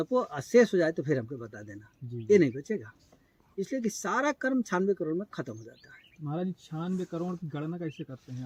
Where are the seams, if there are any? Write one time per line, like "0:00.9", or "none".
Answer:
none